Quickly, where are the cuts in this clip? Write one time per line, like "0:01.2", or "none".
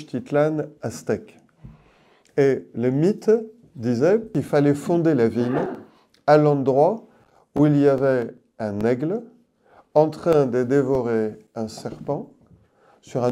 0:04.3

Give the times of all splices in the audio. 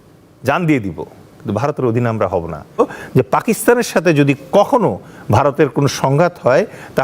0:02.8

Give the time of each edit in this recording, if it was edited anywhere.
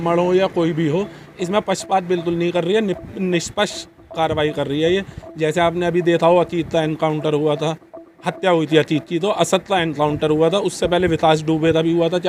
none

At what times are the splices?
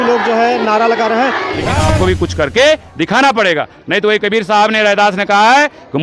0:02.0

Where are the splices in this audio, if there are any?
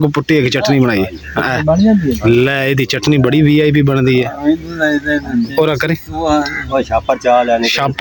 none

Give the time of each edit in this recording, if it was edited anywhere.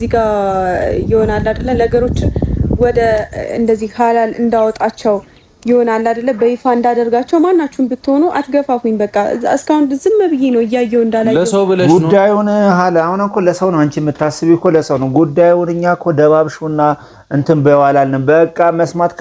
none

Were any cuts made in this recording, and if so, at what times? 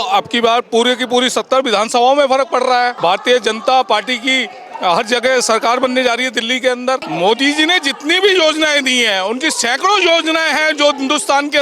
0:02.9
0:07.1

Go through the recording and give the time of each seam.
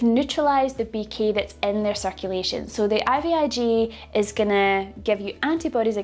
none

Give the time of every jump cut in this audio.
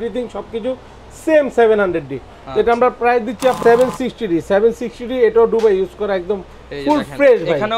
0:03.6

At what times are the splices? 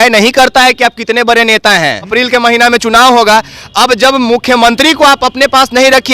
0:02.1

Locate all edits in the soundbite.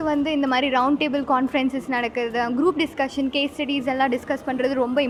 none

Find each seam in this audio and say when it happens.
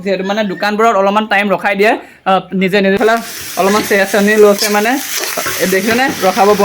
0:03.0

